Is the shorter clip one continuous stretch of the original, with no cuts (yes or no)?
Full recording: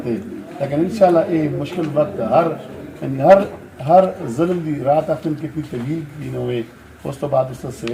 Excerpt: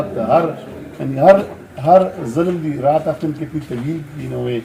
yes